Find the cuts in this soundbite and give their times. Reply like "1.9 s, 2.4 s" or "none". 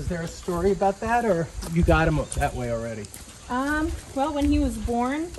none